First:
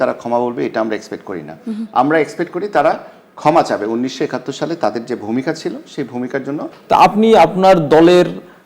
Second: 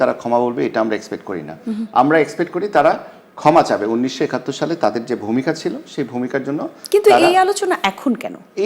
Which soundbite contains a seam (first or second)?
first